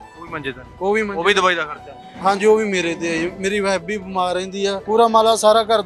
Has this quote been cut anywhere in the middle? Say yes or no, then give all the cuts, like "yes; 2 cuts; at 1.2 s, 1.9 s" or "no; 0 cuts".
yes; 1 cut; at 4.8 s